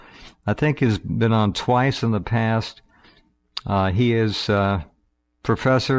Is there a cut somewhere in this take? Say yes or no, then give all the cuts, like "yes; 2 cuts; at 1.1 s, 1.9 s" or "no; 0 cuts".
no; 0 cuts